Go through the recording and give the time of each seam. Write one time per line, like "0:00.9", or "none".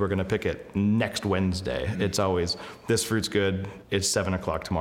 0:03.7